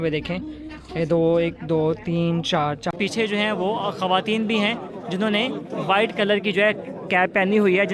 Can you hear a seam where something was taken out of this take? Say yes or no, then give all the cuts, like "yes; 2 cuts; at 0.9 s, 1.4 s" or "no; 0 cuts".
yes; 1 cut; at 2.9 s